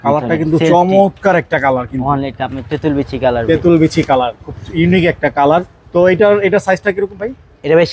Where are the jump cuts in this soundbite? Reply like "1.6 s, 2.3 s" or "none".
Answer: none

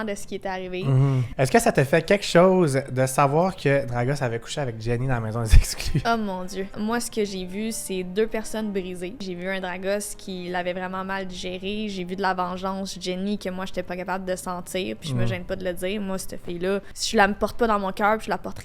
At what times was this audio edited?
1.2 s, 6.7 s, 9.2 s, 17.0 s

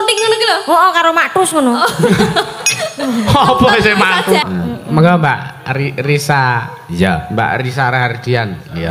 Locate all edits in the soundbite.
4.4 s

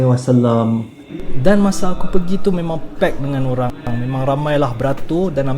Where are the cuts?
3.8 s

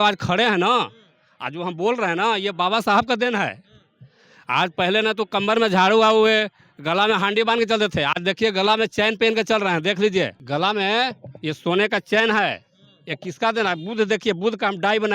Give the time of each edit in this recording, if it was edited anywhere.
10.4 s

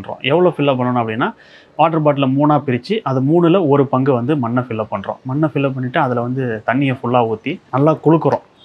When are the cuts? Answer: none

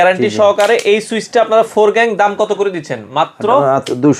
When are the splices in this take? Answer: none

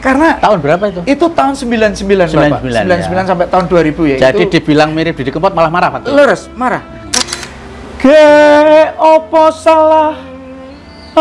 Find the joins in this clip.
7.2 s

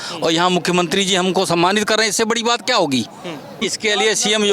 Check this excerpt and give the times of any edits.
3.6 s

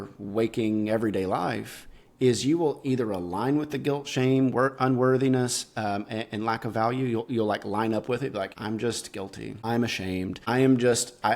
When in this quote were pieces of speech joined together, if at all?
8.5 s, 9.6 s

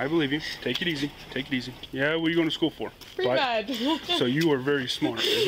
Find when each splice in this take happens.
1.7 s, 3.0 s

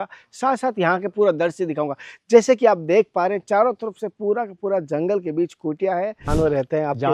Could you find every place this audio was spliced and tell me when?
6.2 s

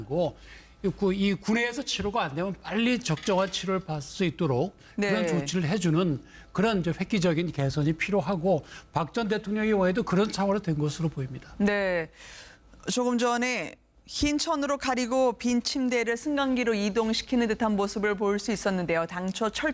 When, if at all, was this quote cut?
13.0 s

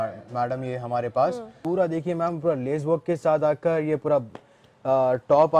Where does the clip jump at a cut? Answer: 1.6 s

